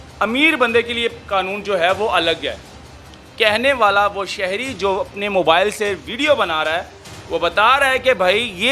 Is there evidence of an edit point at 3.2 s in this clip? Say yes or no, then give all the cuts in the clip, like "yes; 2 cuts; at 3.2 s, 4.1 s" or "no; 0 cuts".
yes; 1 cut; at 3.2 s